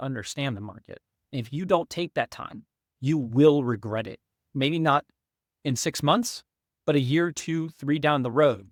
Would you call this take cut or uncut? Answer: uncut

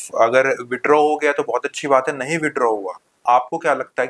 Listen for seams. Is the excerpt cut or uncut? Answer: cut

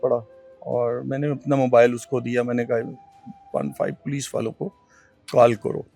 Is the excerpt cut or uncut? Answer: uncut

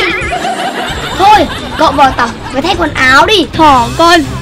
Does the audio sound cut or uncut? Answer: cut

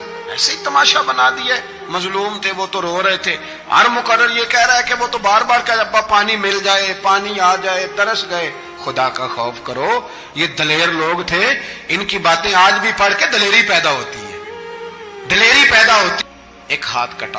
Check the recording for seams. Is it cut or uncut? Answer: cut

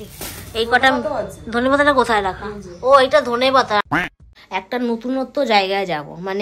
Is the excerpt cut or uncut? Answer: cut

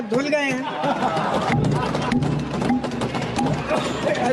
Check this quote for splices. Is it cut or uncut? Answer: uncut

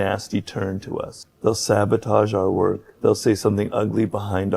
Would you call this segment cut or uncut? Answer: cut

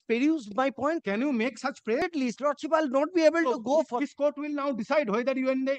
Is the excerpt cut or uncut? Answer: cut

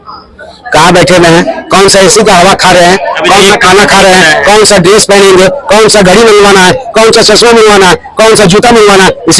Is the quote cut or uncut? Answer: uncut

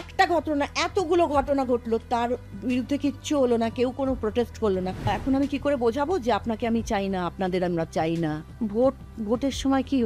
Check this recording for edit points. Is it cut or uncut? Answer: cut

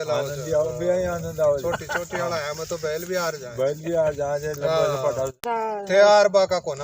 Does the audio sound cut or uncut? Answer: cut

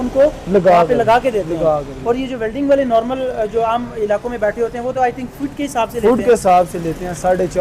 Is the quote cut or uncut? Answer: uncut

